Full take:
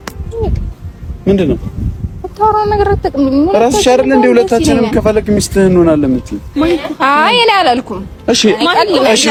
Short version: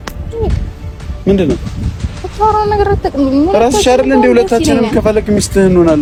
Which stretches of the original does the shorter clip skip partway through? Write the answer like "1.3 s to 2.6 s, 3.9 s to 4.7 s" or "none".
none

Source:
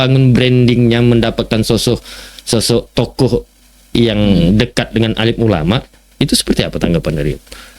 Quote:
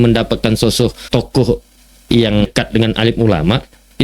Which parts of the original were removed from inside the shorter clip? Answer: 2.1 s to 2.9 s, 4.3 s to 4.7 s

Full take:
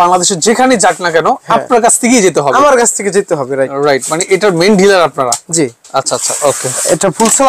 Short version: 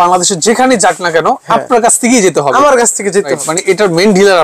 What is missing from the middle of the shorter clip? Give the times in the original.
3.4 s to 4.0 s

